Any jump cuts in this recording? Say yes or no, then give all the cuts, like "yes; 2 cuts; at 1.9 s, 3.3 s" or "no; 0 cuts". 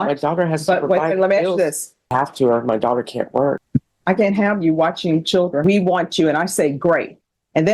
yes; 3 cuts; at 2.1 s, 3.6 s, 5.6 s